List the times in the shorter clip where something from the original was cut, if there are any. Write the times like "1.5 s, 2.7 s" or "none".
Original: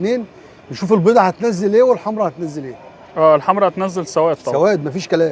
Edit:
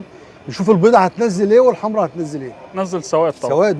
2.8 s